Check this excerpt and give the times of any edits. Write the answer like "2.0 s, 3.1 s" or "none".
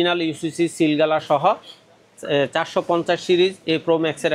none